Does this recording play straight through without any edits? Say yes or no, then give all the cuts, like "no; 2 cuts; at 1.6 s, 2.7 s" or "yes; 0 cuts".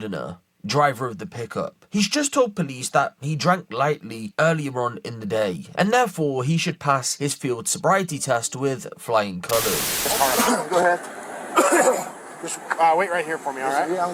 no; 1 cut; at 9.9 s